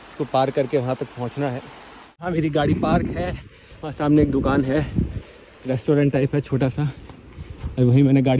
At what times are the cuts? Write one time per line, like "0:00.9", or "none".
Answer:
0:02.2